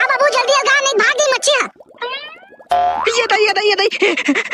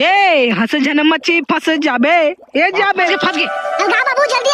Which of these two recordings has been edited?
second; 1 cut; at 3.1 s

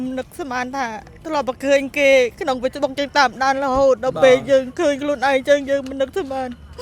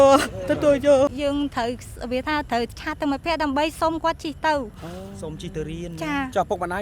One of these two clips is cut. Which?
second; 1 cut; at 1.1 s

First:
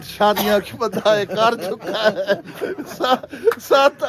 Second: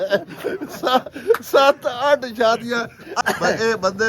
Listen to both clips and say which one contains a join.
second; 1 cut; at 3.1 s

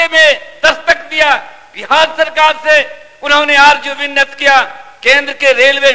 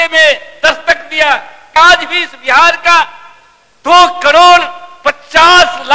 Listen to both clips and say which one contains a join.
second; 1 cut; at 1.7 s

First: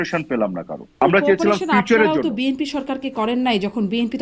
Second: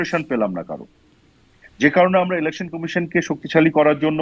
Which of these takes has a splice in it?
first; 1 cut; at 0.9 s

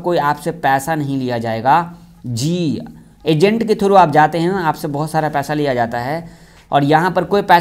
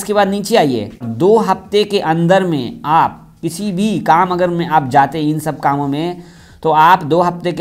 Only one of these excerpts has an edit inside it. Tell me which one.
second; 1 cut; at 1.0 s

